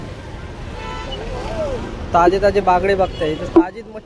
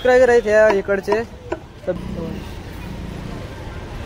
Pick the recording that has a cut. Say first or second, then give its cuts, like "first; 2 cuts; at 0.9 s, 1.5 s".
second; 1 cut; at 2.0 s